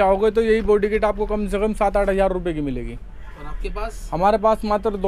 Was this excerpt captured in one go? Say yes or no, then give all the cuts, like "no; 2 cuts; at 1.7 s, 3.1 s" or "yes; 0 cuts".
yes; 0 cuts